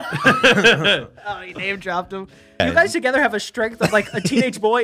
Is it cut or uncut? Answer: cut